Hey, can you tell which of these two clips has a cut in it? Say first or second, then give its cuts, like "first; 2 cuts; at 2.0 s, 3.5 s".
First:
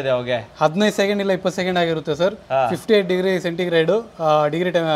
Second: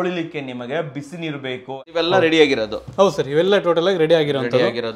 second; 1 cut; at 1.8 s